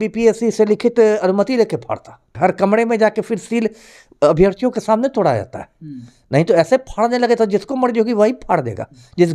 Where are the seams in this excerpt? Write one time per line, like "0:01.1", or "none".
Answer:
0:02.3